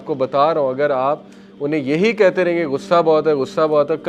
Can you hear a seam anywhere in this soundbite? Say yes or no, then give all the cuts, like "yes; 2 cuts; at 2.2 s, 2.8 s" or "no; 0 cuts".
no; 0 cuts